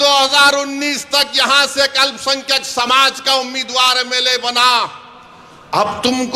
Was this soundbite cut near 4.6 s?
no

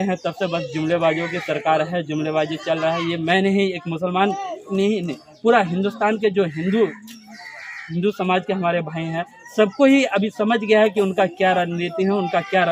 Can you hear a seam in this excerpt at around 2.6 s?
no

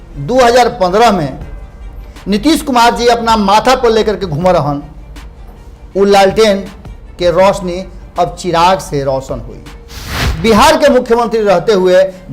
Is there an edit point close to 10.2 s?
yes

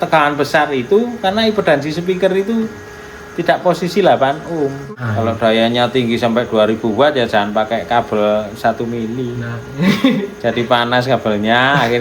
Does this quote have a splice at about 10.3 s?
no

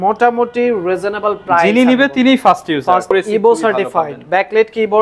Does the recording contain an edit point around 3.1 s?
yes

